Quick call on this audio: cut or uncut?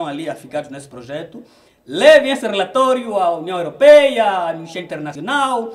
uncut